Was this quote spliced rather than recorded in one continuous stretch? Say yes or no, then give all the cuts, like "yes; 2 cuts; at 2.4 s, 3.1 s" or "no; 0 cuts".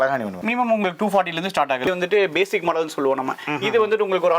yes; 1 cut; at 1.8 s